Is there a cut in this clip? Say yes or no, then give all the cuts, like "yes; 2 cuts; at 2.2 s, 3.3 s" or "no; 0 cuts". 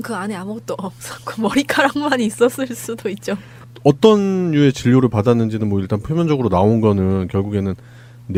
no; 0 cuts